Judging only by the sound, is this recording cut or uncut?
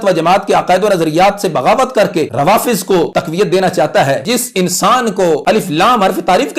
cut